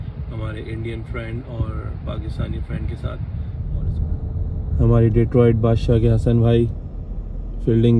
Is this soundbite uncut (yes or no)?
no